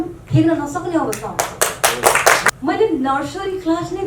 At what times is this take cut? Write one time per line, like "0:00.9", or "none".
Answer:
0:02.5